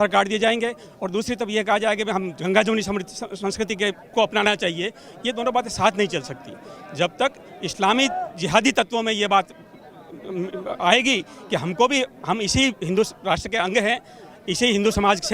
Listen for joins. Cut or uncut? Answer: uncut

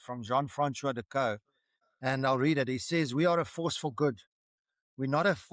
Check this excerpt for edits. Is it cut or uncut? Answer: uncut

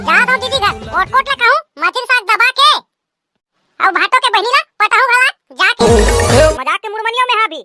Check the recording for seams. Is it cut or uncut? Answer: cut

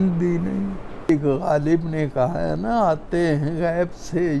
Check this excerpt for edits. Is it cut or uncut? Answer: cut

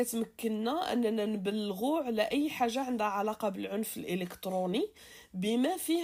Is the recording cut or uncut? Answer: uncut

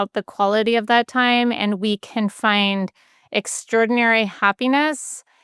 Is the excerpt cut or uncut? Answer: uncut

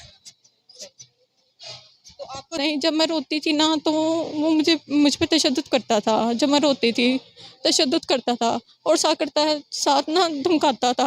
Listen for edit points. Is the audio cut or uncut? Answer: cut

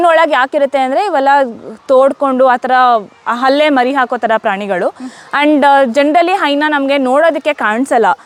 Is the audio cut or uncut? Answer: uncut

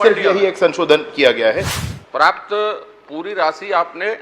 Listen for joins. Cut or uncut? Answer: cut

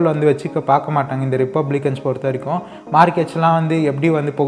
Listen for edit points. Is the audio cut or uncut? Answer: uncut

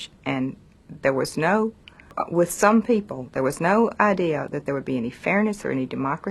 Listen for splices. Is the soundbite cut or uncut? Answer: uncut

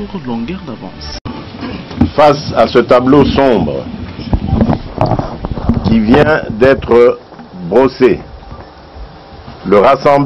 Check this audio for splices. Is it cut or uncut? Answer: cut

